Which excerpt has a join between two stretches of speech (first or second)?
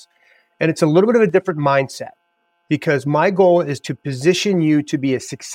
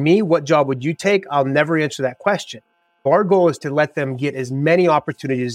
second